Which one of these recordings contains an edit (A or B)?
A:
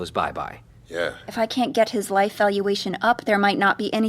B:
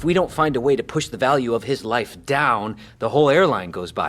A